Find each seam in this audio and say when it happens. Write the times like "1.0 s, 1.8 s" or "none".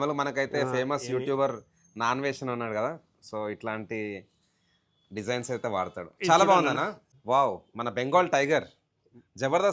7.1 s